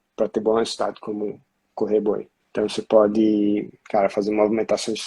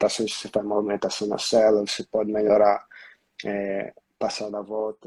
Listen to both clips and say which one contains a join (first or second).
first